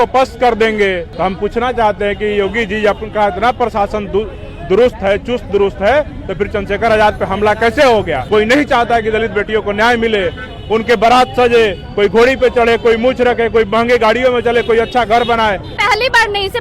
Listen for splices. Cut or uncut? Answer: cut